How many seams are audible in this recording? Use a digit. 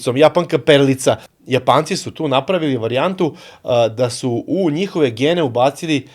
1